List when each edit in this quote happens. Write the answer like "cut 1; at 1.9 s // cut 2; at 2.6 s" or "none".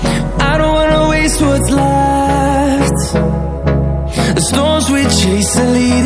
none